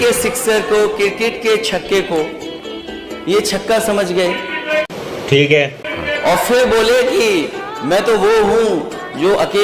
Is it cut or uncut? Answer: uncut